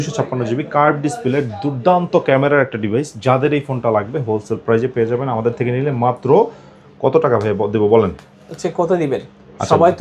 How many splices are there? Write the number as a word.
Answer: zero